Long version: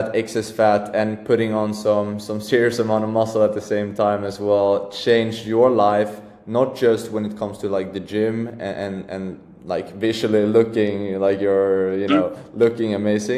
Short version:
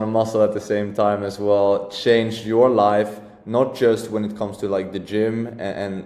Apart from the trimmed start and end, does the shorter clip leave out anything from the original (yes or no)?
no